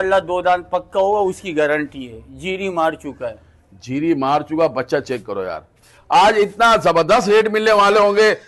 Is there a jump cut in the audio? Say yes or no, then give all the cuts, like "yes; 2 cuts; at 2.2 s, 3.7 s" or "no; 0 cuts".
no; 0 cuts